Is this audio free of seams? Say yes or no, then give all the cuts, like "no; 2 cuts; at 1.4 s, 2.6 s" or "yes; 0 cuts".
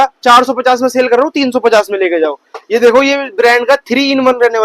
yes; 0 cuts